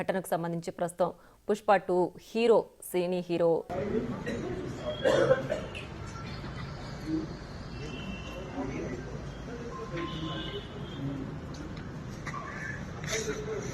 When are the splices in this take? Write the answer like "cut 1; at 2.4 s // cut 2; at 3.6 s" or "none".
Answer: cut 1; at 3.7 s